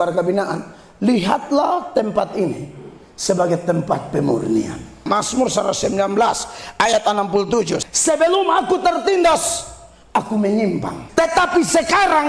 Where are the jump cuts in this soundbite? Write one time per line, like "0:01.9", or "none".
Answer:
0:05.0
0:07.8
0:11.0